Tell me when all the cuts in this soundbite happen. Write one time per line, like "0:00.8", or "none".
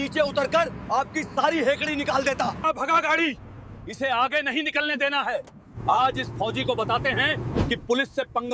0:02.6